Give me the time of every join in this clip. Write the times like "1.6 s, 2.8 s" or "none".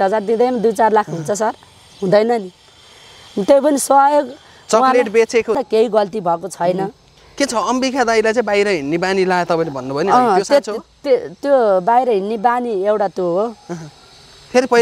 5.6 s

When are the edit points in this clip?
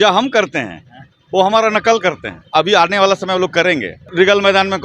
2.4 s, 4.1 s

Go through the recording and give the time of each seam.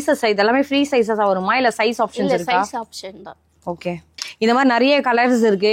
4.1 s

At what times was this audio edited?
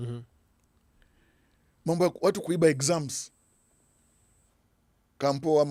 none

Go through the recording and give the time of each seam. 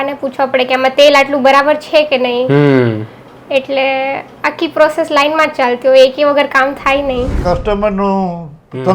7.4 s

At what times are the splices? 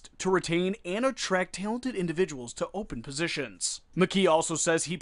3.8 s

